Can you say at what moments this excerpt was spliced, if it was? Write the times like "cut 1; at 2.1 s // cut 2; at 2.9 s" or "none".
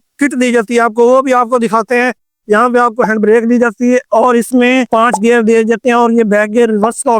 none

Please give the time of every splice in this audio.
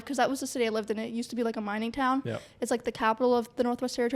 none

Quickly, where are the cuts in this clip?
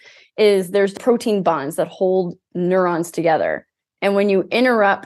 cut 1; at 0.9 s

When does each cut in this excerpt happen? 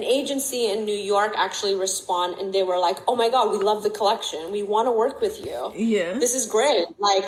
none

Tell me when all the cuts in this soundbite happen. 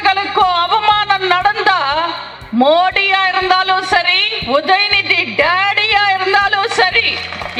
none

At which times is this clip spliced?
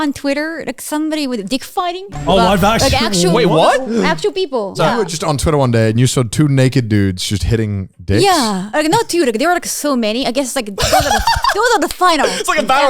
cut 1; at 2.1 s // cut 2; at 4.7 s // cut 3; at 8.6 s

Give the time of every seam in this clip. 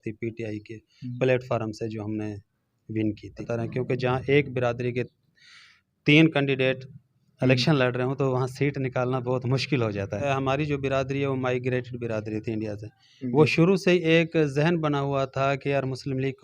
cut 1; at 3.4 s // cut 2; at 10.2 s

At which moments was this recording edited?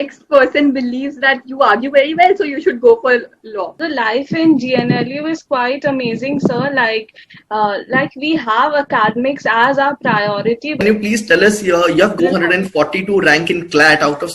cut 1; at 3.8 s // cut 2; at 10.8 s // cut 3; at 12.2 s

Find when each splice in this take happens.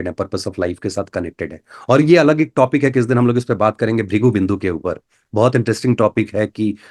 none

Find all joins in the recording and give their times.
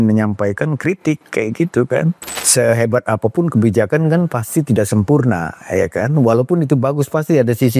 cut 1; at 2.3 s

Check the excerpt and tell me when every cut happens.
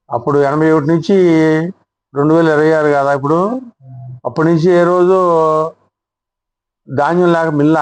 none

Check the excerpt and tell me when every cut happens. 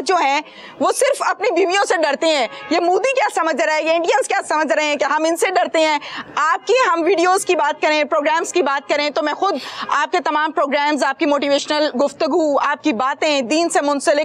none

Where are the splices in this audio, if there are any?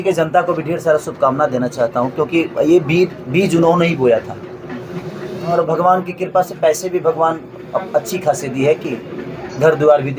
cut 1; at 5.5 s

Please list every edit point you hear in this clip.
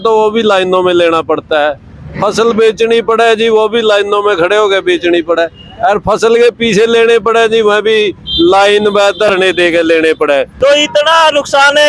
cut 1; at 10.5 s

